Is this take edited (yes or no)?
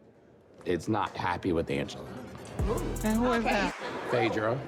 yes